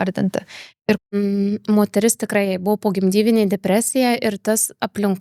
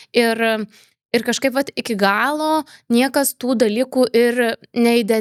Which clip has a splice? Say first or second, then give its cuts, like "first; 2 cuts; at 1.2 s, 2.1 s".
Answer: first; 1 cut; at 1.2 s